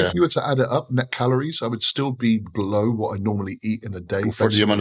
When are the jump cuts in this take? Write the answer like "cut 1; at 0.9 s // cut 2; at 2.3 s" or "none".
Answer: none